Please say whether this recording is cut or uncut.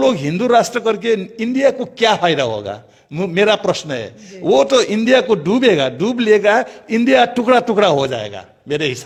uncut